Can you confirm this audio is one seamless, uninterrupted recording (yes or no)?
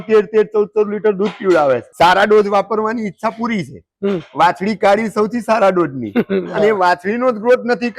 no